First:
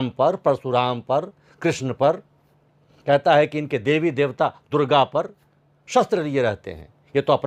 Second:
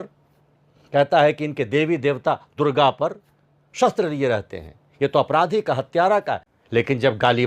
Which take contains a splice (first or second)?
second